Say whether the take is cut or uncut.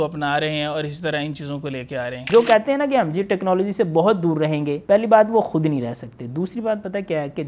cut